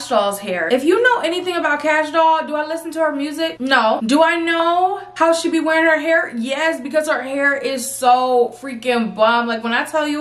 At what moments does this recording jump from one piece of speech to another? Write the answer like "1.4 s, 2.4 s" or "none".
none